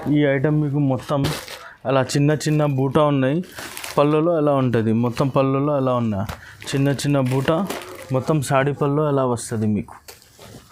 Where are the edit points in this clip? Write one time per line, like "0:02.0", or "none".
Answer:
none